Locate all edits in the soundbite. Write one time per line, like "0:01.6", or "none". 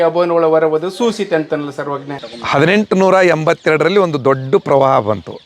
0:02.3